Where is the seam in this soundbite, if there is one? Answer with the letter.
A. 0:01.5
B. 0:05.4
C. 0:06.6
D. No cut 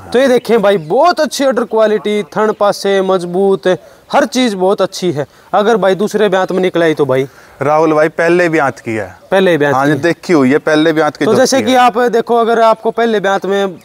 D